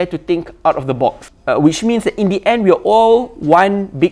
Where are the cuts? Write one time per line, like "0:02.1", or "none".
0:01.3